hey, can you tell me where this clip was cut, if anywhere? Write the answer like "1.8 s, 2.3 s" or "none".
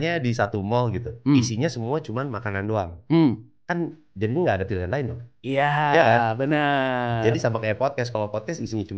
none